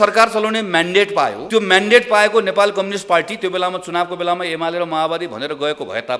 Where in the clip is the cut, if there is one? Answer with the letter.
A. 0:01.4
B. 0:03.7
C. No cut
A